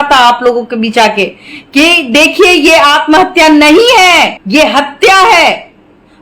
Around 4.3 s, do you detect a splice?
no; 0 cuts

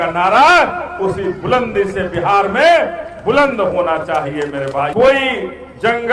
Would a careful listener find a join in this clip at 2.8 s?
no; 1 cut; at 4.9 s

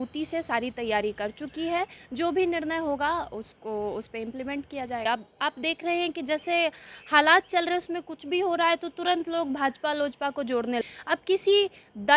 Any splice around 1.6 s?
no; 2 cuts; at 5.1 s, 10.8 s

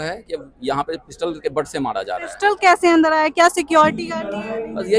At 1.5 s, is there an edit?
no; 0 cuts

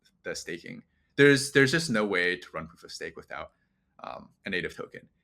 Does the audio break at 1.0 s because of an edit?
yes; 1 cut; at 1.0 s

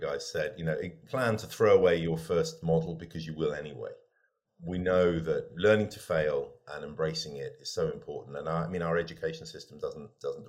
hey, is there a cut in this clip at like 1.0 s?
yes; 3 cuts; at 1.0 s, 4.5 s, 5.5 s

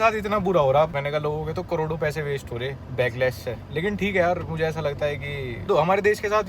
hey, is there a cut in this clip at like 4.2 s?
no; 3 cuts; at 0.9 s, 2.8 s, 5.6 s

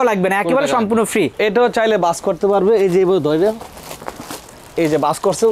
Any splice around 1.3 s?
yes; 1 cut; at 1.3 s

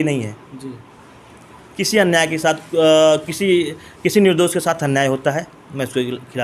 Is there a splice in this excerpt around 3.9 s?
no; 0 cuts

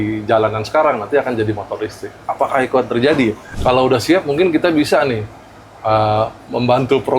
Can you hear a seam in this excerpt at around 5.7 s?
no; 1 cut; at 3.5 s

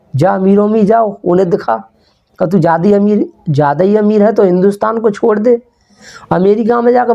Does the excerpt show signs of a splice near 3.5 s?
no; 1 cut; at 6.1 s

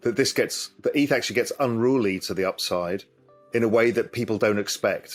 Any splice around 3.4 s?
no; 0 cuts

